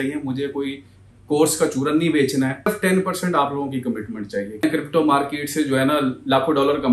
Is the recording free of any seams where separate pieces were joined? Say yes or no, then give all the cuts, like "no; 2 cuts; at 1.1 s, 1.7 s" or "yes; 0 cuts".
no; 2 cuts; at 2.7 s, 4.6 s